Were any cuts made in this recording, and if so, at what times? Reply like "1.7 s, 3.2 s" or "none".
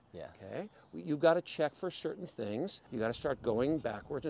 2.8 s